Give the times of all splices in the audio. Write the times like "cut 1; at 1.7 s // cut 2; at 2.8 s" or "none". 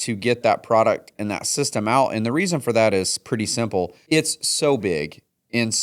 cut 1; at 4.0 s